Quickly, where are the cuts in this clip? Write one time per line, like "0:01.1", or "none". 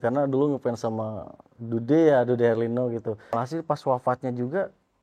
0:03.3